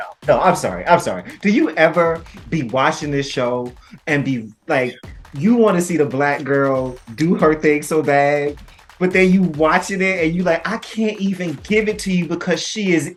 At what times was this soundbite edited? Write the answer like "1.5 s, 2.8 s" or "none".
none